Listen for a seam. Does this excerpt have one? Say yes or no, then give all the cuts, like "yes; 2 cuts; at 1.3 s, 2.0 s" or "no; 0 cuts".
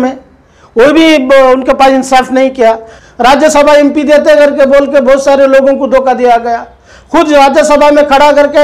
yes; 1 cut; at 2.9 s